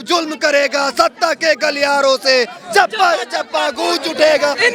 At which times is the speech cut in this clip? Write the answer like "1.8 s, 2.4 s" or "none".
none

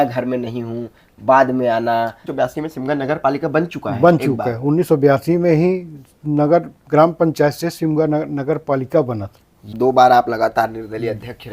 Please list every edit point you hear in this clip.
2.2 s, 9.7 s

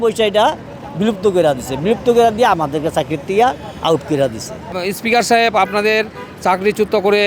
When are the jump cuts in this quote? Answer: 4.7 s

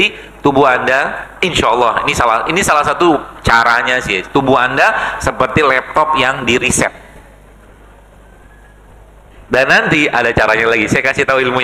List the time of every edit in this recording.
none

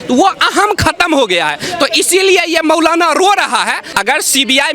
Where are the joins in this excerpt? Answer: 3.8 s

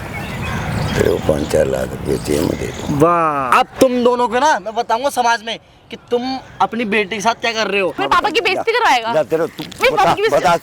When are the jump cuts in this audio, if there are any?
3.5 s, 8.0 s

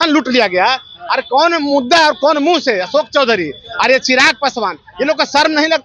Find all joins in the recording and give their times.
none

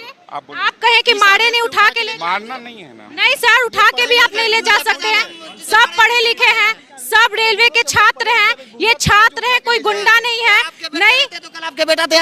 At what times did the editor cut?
none

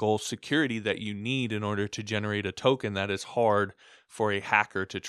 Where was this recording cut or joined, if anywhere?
none

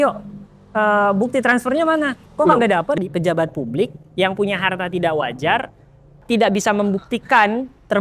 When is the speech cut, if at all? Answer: 2.2 s, 3.0 s, 6.2 s

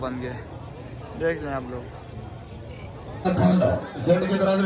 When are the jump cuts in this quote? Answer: 3.2 s

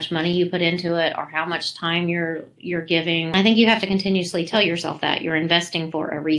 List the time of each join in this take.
3.3 s, 4.5 s

